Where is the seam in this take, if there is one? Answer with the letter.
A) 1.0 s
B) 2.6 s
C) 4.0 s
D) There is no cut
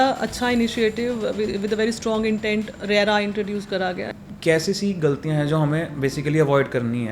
C